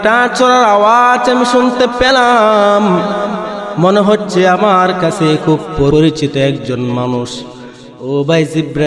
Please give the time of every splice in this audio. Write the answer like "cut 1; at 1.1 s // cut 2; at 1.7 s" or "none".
cut 1; at 5.9 s